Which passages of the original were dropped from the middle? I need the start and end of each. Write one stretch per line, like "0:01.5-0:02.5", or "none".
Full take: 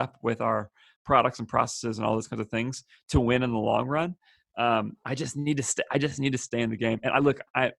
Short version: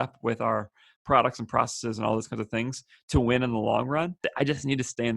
0:04.2-0:05.8